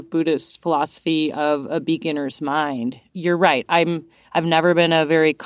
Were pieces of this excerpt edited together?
no; 0 cuts

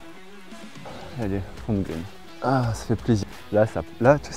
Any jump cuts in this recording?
yes; 3 cuts; at 0.9 s, 2.2 s, 3.2 s

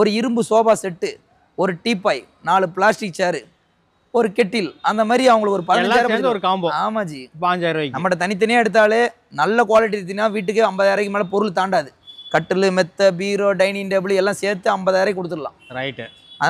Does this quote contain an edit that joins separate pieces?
no; 0 cuts

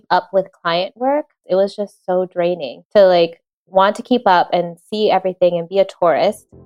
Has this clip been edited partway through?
yes; 2 cuts; at 1.4 s, 2.7 s

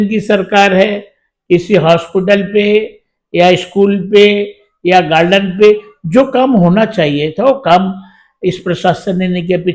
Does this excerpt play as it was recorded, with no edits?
yes; 0 cuts

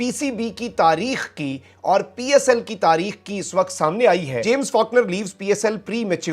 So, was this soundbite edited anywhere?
yes; 1 cut; at 4.3 s

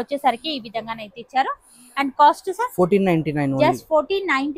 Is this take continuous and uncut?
yes; 0 cuts

